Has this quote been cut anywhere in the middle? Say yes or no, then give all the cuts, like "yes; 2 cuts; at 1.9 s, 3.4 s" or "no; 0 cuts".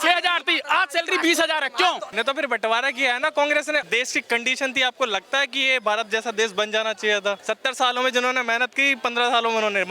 yes; 3 cuts; at 2.1 s, 3.8 s, 7.4 s